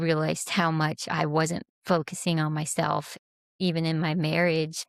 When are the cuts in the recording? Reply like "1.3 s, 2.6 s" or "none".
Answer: none